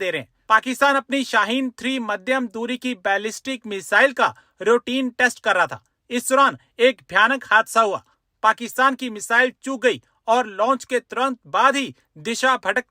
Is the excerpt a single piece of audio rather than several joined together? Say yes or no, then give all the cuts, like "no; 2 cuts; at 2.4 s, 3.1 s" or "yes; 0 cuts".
yes; 0 cuts